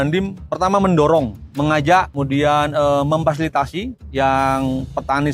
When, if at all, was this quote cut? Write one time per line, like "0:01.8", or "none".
0:01.4
0:02.1
0:04.0